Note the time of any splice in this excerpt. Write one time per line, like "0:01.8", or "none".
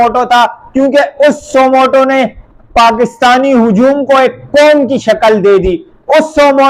none